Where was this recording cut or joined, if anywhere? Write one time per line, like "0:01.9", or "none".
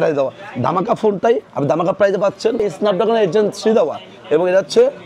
0:02.6